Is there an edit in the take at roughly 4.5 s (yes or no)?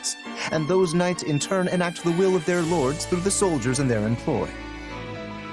yes